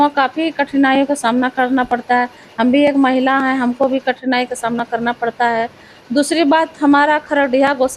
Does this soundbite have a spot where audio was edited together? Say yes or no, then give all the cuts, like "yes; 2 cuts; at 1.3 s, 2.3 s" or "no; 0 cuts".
no; 0 cuts